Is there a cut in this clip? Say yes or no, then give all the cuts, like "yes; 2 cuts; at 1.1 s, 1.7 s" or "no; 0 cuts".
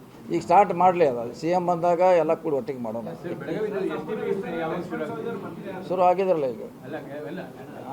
no; 0 cuts